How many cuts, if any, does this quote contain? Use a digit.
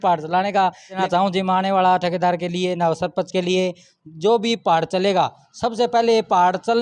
1